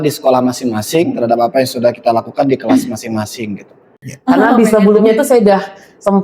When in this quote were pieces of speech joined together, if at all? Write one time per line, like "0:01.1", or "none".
0:04.3